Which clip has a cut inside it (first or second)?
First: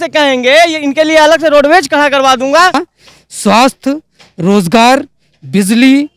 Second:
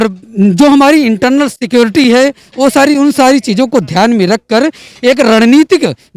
first